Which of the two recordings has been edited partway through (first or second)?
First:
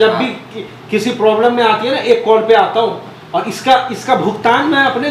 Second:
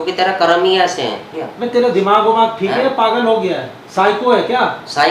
second